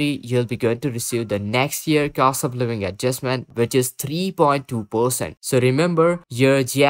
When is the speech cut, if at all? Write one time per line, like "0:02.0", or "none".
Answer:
none